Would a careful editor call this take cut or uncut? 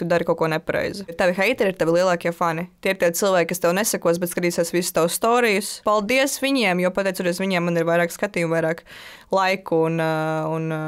cut